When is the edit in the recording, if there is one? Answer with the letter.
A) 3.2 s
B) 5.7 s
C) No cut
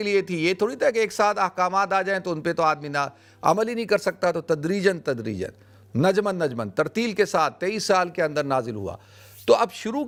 C